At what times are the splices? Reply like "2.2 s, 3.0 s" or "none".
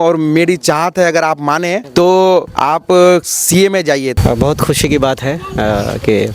1.8 s, 2.5 s, 4.1 s